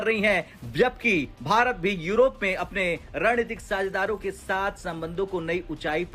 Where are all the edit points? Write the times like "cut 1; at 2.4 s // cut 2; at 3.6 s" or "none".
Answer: none